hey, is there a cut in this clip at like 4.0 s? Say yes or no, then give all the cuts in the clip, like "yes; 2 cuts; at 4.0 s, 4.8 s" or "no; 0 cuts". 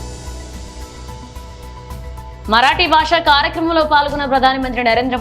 no; 1 cut; at 1.2 s